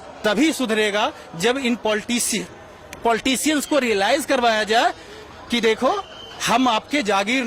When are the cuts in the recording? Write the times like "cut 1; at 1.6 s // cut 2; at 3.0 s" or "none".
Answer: none